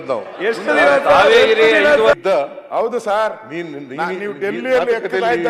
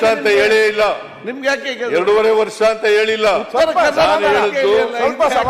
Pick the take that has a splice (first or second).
first